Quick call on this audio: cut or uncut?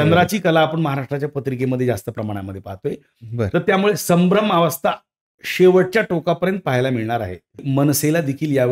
cut